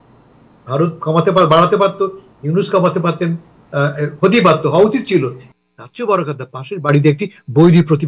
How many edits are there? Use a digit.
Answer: 1